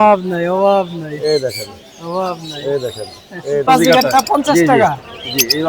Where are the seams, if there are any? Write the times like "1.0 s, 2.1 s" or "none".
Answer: 3.7 s